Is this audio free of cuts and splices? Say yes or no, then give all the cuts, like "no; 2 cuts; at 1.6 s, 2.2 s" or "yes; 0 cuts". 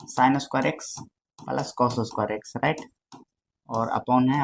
yes; 0 cuts